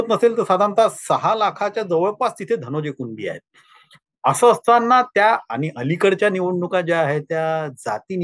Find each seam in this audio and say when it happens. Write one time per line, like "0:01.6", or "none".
none